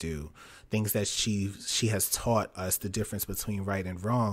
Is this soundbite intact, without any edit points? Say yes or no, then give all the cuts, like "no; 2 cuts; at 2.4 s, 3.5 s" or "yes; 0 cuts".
yes; 0 cuts